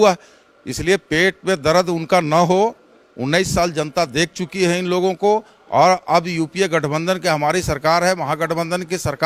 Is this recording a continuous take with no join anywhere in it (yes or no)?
yes